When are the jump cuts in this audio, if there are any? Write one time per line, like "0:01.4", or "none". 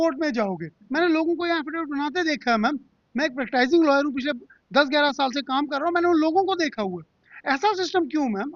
none

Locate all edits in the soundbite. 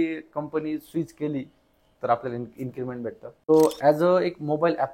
0:03.5

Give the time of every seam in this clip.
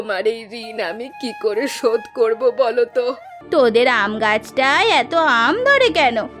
0:03.4

